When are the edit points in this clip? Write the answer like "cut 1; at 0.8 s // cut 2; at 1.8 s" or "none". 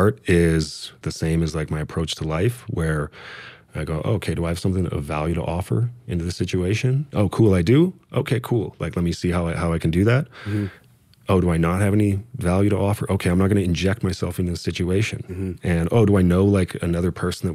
cut 1; at 1.1 s // cut 2; at 7.1 s